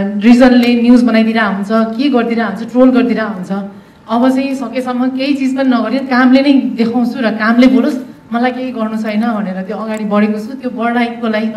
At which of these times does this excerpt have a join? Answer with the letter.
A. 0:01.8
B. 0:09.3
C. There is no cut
C